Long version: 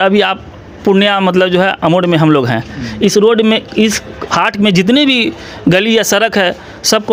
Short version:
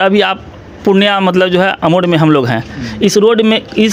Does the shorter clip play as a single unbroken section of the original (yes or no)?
yes